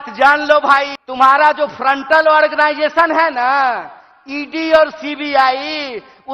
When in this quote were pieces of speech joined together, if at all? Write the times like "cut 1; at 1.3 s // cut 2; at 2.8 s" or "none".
cut 1; at 1.0 s